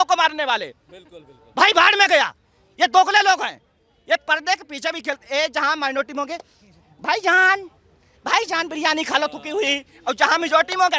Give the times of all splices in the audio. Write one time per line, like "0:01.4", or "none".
none